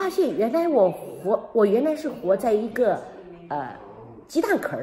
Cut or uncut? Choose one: uncut